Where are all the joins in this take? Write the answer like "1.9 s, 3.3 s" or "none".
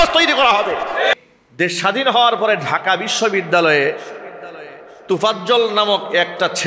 1.1 s